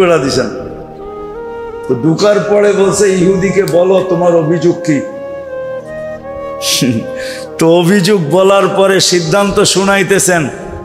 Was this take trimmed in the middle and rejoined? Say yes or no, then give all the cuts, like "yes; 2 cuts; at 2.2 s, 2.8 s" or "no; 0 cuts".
no; 0 cuts